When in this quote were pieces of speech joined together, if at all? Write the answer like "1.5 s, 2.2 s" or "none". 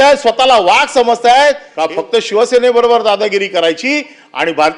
1.7 s